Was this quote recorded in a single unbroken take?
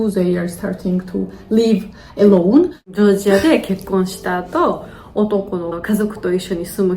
no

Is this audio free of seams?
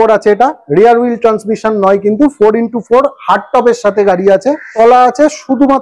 no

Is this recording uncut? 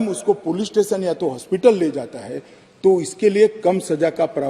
yes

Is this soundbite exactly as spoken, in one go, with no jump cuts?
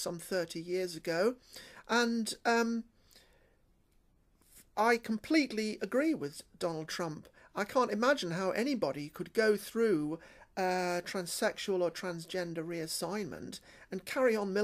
no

